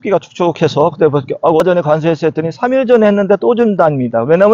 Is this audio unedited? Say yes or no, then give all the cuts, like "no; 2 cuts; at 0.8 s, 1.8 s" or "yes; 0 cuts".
no; 1 cut; at 1.6 s